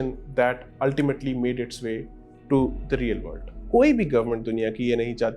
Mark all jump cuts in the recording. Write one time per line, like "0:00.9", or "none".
0:03.5